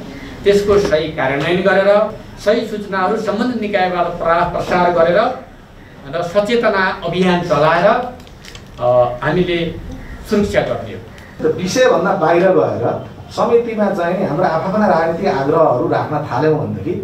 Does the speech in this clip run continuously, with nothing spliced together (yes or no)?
no